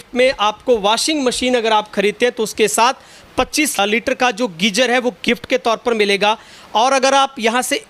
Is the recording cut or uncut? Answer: cut